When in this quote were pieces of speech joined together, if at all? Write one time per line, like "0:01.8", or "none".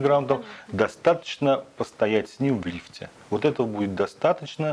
none